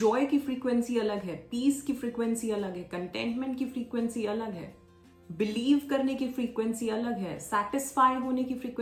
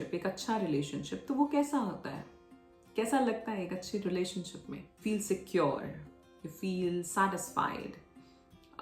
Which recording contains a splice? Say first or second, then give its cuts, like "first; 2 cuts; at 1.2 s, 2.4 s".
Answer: second; 1 cut; at 4.9 s